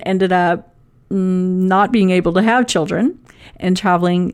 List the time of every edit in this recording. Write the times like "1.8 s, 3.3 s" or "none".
none